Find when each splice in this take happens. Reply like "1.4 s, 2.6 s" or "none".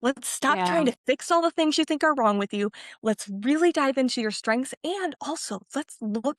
none